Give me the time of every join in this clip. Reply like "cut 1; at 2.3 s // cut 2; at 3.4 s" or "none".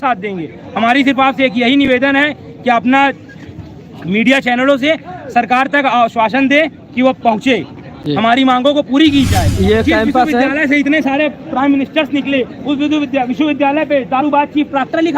cut 1; at 9.4 s

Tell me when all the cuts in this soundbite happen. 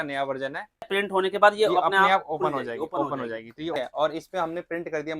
cut 1; at 0.9 s // cut 2; at 3.8 s

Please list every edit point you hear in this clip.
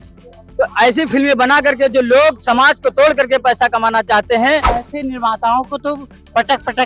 cut 1; at 4.8 s

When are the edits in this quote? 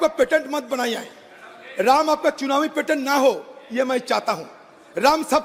none

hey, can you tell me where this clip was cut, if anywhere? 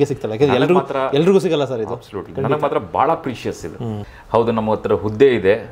cut 1; at 4.1 s

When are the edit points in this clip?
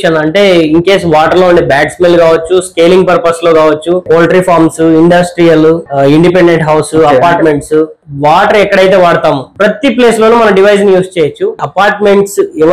cut 1; at 4.0 s // cut 2; at 5.9 s // cut 3; at 8.0 s // cut 4; at 9.5 s // cut 5; at 11.6 s

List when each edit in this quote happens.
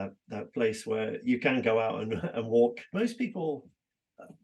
cut 1; at 2.8 s

